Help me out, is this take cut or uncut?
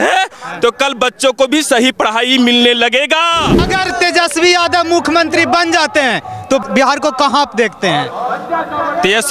cut